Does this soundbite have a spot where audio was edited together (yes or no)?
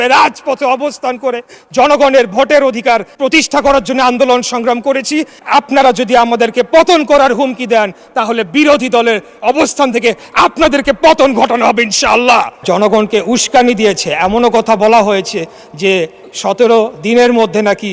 yes